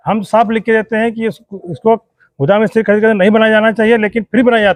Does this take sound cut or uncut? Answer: uncut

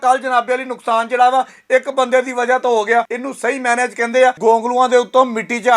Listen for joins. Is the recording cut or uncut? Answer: cut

